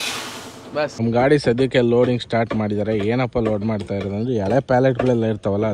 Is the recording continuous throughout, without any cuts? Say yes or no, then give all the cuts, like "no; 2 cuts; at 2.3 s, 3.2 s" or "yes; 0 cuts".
no; 1 cut; at 1.0 s